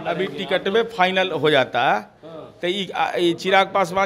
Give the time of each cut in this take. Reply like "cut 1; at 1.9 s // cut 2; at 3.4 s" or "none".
none

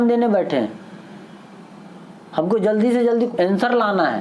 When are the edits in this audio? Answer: cut 1; at 3.3 s

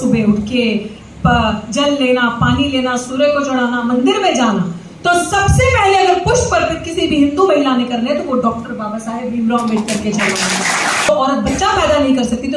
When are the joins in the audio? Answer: cut 1; at 11.1 s

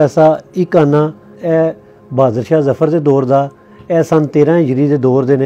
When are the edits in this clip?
cut 1; at 1.4 s

